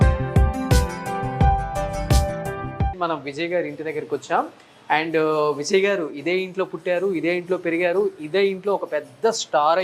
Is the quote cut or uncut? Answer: uncut